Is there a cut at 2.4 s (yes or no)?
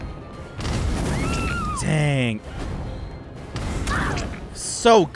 yes